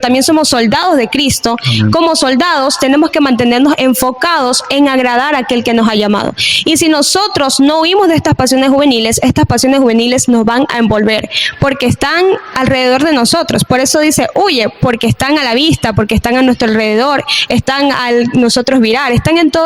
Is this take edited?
no; 0 cuts

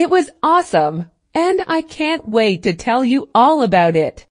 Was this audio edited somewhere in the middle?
no; 0 cuts

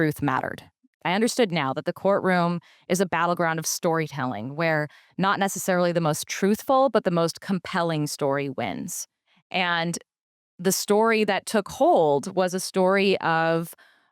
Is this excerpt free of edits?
no; 1 cut; at 1.0 s

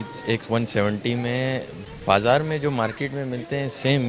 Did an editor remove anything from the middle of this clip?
yes; 1 cut; at 1.7 s

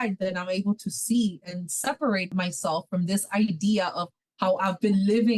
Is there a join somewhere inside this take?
yes; 2 cuts; at 2.3 s, 4.1 s

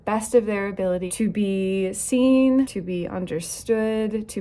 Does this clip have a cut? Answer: yes; 2 cuts; at 1.1 s, 2.7 s

